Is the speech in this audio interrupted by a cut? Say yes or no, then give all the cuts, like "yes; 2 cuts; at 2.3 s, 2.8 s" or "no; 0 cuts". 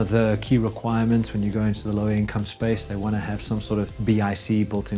yes; 1 cut; at 3.9 s